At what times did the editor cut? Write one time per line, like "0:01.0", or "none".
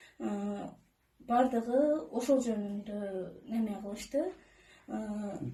none

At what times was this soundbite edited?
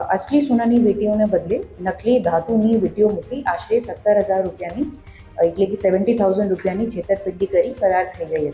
none

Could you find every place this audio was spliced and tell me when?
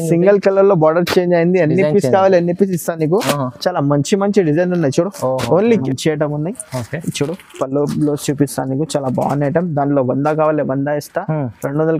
0:05.8

